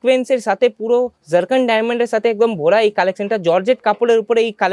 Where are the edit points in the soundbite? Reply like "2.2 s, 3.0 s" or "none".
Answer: none